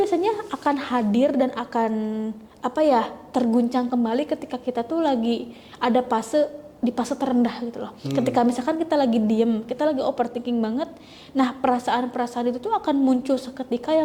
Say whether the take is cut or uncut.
uncut